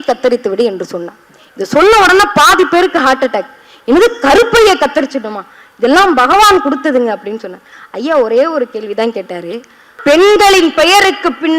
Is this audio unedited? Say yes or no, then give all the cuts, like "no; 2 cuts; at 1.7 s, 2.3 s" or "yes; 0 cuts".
no; 1 cut; at 9.9 s